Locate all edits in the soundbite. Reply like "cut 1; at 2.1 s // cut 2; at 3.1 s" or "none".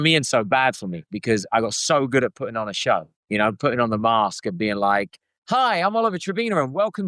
cut 1; at 3.1 s